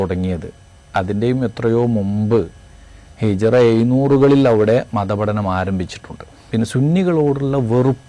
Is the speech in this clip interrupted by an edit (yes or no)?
yes